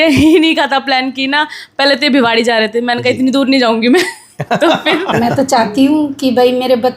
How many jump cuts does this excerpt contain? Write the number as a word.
one